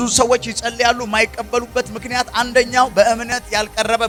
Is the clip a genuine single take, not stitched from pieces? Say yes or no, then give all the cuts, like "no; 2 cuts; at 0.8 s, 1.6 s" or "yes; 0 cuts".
yes; 0 cuts